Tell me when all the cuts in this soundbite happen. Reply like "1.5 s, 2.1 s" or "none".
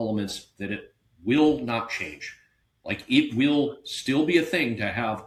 none